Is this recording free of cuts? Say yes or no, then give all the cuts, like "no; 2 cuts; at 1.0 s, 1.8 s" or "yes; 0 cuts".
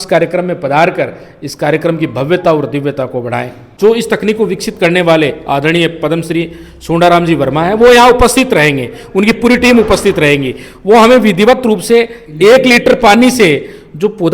no; 1 cut; at 3.7 s